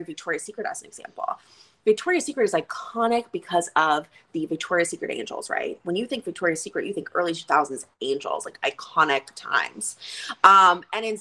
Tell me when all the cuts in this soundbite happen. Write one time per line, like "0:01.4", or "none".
none

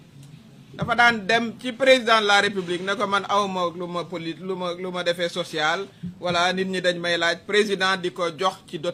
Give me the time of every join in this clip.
none

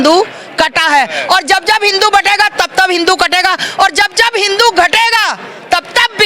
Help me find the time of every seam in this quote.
none

